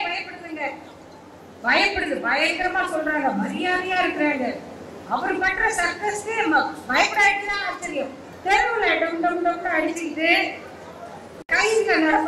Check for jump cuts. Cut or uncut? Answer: cut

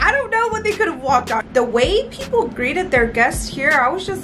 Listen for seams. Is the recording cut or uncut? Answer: cut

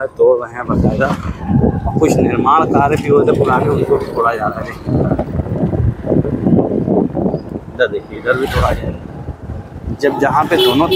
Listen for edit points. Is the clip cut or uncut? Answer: uncut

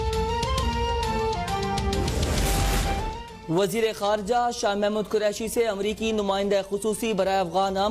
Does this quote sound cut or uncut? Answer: cut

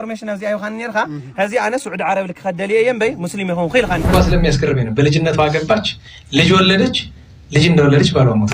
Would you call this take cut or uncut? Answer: cut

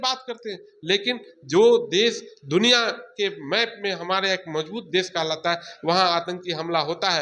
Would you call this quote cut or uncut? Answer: uncut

